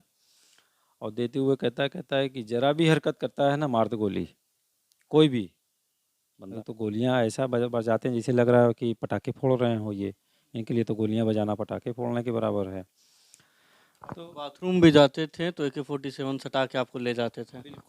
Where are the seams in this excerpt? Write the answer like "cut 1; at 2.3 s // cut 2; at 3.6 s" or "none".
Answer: cut 1; at 6.4 s